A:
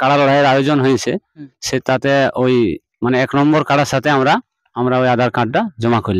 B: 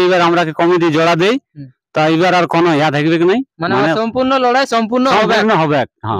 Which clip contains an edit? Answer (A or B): A